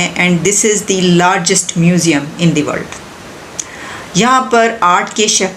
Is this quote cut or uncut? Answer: uncut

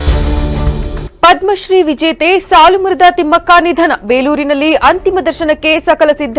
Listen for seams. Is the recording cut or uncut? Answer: cut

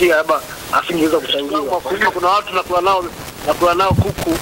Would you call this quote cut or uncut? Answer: cut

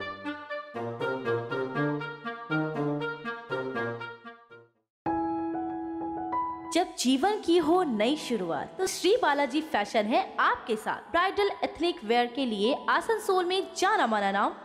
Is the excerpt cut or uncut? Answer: uncut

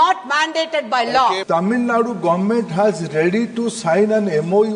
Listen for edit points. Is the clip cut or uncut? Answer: cut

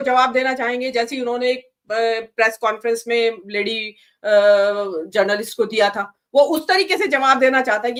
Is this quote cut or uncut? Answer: uncut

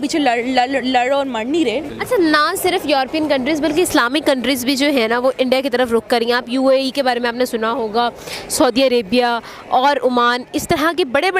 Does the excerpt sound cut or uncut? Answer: cut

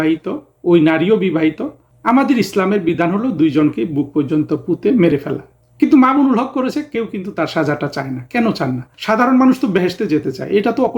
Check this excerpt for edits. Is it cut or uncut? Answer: cut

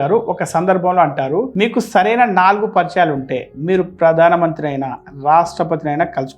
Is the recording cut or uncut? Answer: uncut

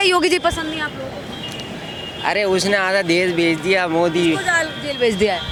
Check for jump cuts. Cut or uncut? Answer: uncut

